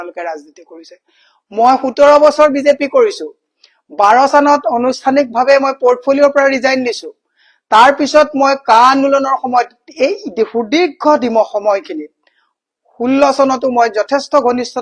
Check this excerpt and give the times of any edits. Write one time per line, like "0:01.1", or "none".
none